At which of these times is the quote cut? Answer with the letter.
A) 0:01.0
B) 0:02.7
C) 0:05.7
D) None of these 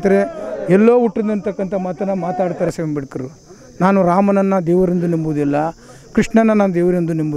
B